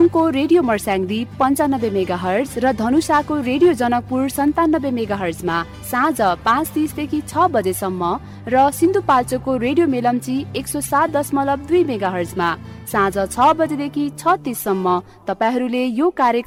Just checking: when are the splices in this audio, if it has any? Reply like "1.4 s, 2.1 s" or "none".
none